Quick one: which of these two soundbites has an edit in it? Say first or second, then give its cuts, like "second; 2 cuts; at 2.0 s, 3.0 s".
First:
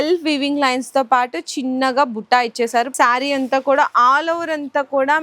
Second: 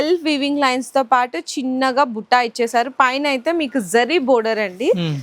first; 1 cut; at 2.9 s